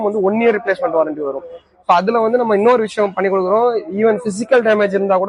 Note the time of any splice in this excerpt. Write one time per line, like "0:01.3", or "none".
none